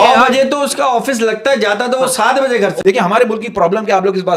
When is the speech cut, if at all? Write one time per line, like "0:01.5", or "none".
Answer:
0:02.8